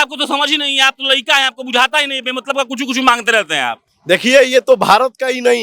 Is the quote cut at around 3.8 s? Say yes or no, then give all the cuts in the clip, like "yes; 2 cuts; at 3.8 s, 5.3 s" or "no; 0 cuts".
no; 0 cuts